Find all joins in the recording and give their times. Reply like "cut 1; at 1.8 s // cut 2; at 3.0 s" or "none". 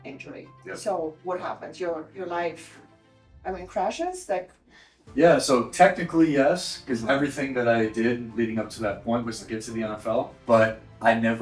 cut 1; at 10.3 s

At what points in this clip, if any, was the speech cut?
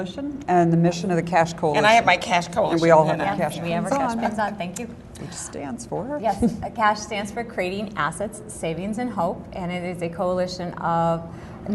cut 1; at 2.9 s

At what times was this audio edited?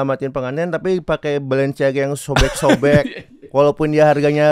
none

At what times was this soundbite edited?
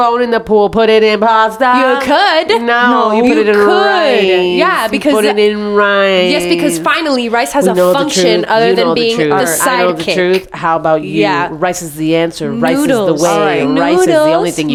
none

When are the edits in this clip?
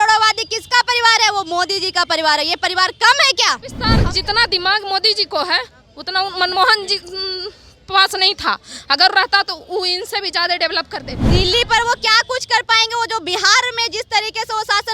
cut 1; at 3.9 s // cut 2; at 11.2 s

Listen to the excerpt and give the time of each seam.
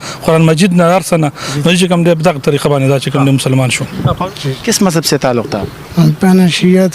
cut 1; at 4.2 s

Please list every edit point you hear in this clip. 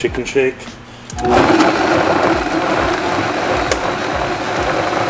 none

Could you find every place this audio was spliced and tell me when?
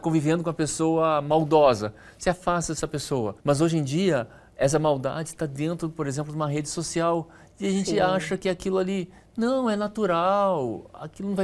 cut 1; at 3.4 s

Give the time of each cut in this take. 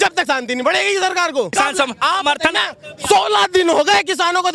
cut 1; at 1.5 s

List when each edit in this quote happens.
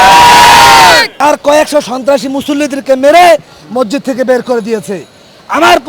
cut 1; at 1.1 s

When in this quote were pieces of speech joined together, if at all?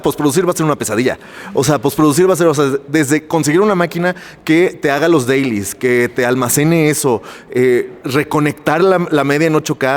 none

